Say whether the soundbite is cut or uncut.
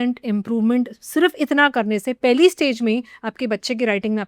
uncut